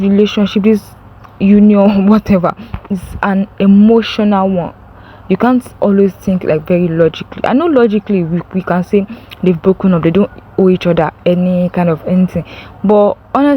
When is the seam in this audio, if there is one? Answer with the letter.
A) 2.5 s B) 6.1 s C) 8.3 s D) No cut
D